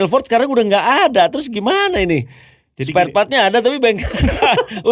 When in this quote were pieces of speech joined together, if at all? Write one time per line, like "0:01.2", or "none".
none